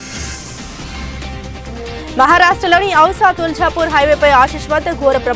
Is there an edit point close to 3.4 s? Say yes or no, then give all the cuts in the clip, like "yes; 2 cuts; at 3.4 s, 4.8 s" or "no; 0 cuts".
no; 1 cut; at 1.4 s